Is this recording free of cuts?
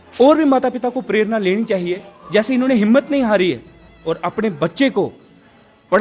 yes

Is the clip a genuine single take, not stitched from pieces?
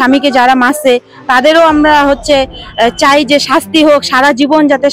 yes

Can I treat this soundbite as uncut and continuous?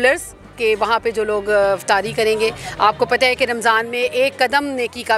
yes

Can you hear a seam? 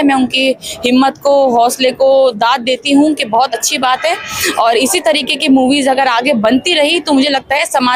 no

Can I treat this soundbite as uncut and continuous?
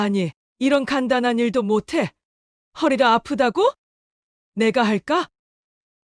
yes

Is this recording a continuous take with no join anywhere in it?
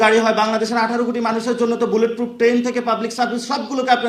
yes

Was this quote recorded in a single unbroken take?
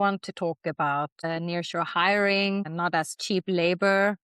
no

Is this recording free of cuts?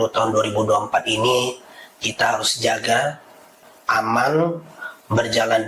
no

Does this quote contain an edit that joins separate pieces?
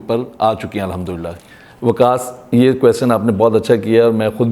yes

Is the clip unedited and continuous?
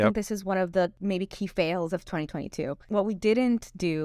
no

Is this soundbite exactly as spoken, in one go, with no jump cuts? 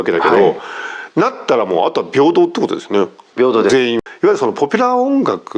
no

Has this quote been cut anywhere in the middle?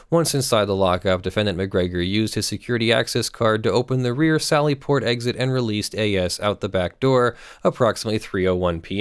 no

